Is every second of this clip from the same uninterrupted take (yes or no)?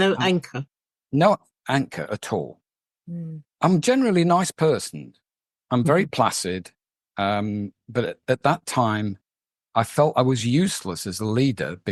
yes